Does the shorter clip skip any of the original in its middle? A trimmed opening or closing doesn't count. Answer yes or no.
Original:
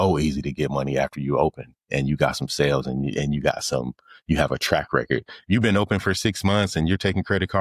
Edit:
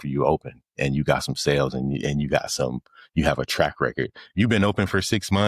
no